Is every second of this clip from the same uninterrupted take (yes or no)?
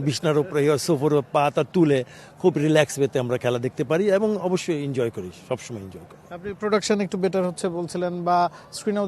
yes